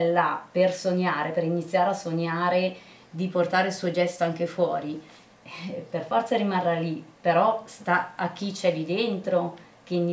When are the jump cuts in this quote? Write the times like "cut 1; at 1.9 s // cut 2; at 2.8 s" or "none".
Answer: none